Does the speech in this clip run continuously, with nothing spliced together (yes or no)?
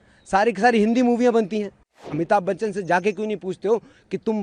no